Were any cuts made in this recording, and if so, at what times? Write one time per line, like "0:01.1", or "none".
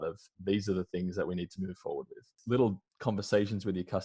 0:02.3
0:02.9